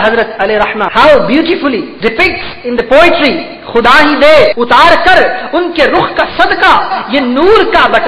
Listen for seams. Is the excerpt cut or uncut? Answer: cut